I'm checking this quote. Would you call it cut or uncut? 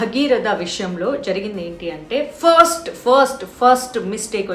uncut